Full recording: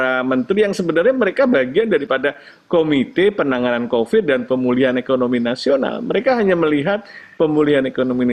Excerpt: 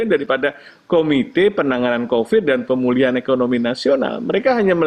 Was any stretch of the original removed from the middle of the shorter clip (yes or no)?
no